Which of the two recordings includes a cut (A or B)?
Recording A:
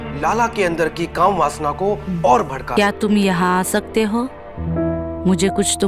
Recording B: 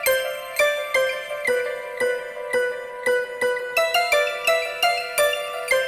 A